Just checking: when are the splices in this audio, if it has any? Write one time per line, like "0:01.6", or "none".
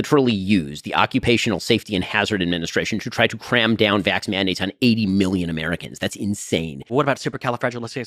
0:06.9